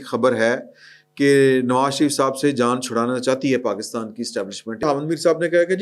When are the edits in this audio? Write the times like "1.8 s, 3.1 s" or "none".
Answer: 4.8 s